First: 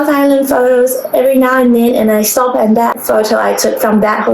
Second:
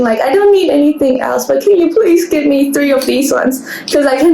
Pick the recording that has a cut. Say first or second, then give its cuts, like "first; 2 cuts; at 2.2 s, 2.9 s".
first; 1 cut; at 3.0 s